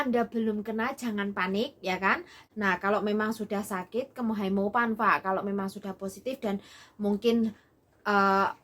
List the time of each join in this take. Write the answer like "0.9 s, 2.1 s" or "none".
2.4 s